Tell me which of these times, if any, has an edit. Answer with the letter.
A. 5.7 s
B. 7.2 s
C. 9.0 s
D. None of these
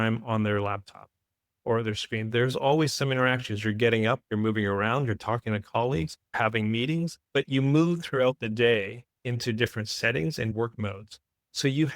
B